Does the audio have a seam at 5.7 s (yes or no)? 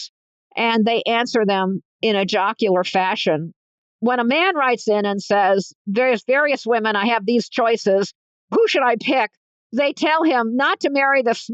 no